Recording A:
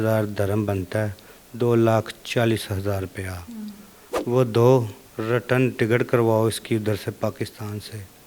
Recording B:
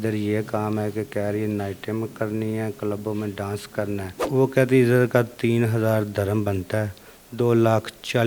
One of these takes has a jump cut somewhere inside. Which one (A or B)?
B